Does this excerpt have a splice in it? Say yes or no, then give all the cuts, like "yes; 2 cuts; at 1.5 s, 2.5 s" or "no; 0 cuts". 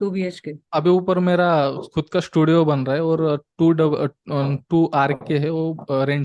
no; 0 cuts